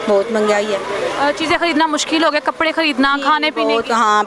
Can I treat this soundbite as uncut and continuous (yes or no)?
yes